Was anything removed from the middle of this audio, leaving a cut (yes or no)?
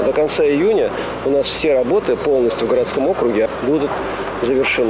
yes